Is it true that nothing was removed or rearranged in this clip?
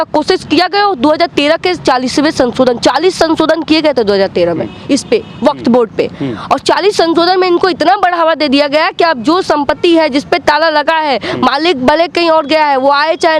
yes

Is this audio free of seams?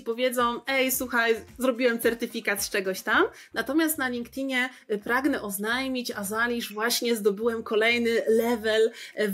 yes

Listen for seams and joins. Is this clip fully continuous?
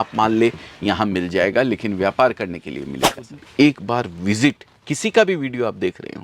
no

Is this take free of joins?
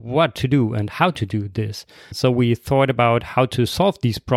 no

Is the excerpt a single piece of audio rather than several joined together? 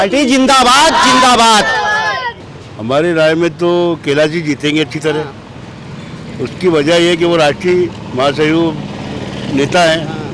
no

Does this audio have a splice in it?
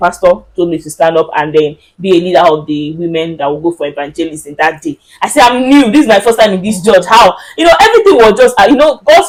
no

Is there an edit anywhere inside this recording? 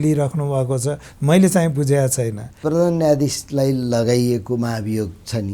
yes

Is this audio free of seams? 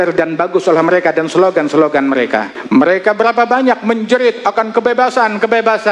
no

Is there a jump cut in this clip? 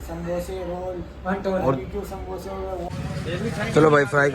yes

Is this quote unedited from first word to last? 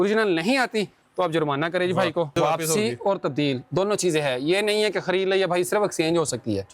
no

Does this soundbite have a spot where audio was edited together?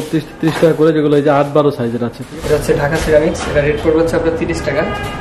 yes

